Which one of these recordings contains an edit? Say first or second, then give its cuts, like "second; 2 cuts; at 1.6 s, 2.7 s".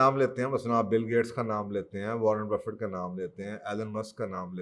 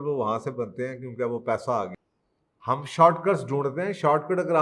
second; 1 cut; at 1.9 s